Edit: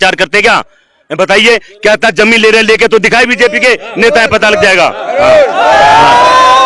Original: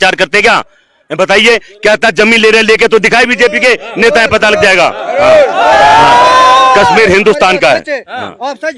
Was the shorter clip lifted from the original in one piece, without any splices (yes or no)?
yes